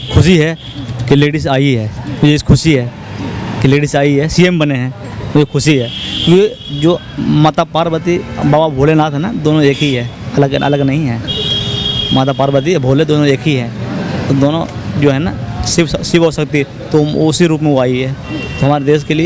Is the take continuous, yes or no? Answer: yes